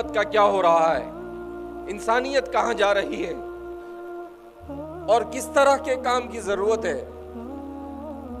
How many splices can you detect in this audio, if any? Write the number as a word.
zero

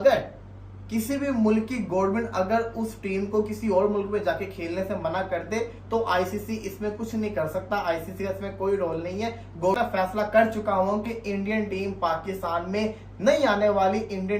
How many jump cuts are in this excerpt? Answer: one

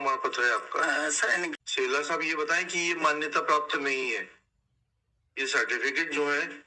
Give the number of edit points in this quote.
one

